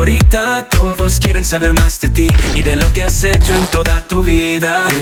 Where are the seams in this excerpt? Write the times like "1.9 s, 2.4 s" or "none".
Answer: none